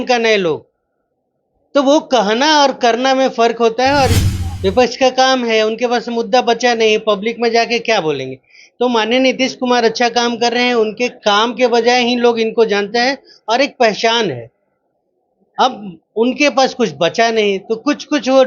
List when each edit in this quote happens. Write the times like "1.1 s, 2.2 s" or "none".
4.2 s